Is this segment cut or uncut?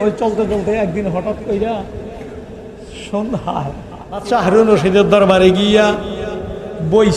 cut